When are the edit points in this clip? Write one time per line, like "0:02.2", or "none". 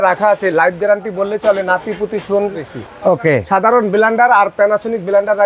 none

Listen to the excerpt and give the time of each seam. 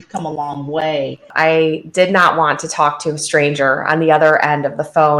0:01.3

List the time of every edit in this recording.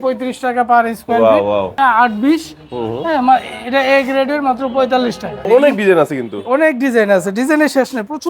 0:01.7
0:05.4

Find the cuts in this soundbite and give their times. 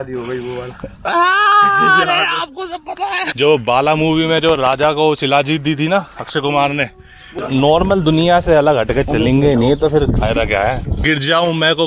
0:03.2
0:07.4
0:11.0

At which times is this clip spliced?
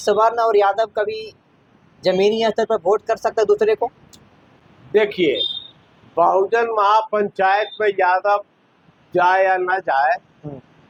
none

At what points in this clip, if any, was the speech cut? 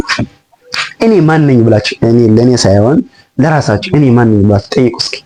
none

